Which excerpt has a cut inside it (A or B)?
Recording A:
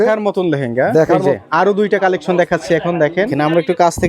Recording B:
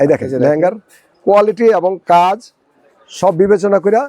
A